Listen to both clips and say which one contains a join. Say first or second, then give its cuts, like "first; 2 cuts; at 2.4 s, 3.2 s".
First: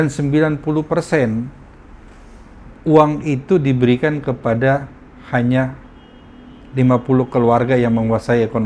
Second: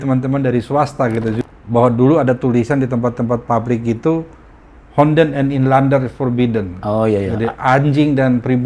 second; 1 cut; at 1.4 s